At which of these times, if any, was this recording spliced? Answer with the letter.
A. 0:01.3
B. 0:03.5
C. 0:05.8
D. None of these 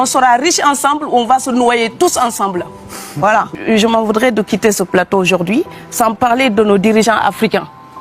B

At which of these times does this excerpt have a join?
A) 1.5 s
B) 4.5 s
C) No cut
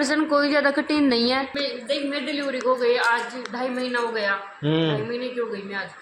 A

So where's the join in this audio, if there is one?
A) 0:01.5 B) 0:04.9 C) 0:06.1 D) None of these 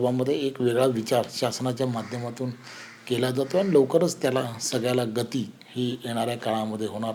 D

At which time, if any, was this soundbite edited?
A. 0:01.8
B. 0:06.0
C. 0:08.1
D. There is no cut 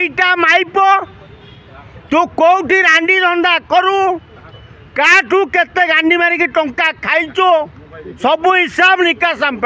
D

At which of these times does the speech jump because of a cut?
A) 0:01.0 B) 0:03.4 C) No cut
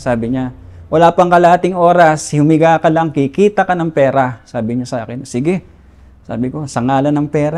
C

